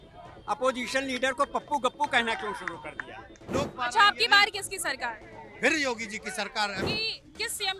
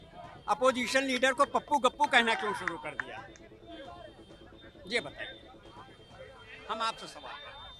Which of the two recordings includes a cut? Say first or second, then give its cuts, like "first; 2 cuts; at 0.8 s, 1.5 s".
first; 2 cuts; at 3.5 s, 6.8 s